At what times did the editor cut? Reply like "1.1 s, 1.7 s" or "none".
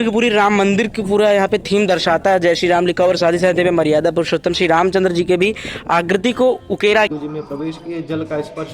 7.1 s